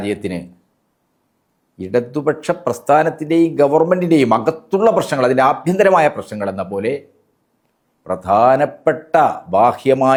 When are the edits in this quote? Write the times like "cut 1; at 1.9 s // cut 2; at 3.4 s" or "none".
none